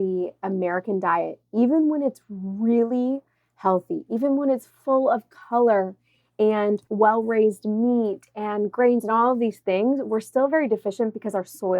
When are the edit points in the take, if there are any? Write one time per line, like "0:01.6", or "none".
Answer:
0:06.9